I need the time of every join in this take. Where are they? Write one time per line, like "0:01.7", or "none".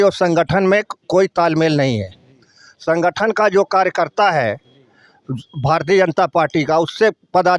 none